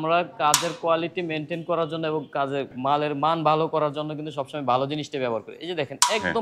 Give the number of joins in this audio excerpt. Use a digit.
1